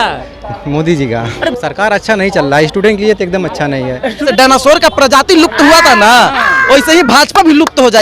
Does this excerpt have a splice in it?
yes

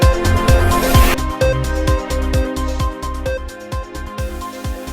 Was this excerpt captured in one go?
no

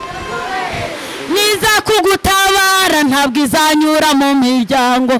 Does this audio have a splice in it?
yes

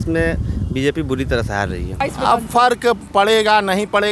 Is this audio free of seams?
no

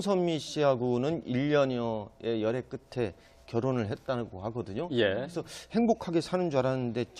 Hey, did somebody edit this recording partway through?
no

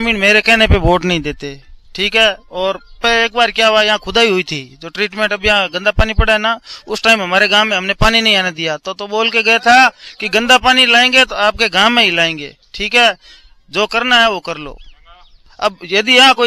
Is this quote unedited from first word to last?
yes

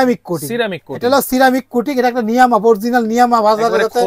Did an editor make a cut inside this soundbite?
no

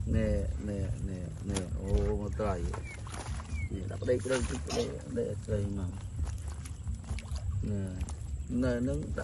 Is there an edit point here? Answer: no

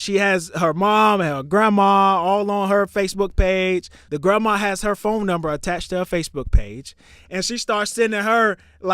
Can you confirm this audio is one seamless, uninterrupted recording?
no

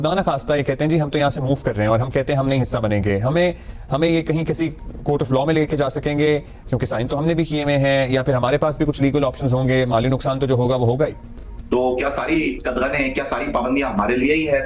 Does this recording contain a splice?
yes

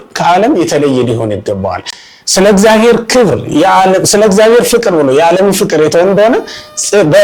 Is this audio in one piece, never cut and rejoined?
yes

